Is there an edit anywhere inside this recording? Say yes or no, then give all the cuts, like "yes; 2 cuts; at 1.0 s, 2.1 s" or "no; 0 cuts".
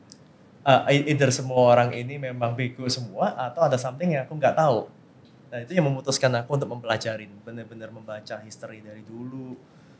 no; 0 cuts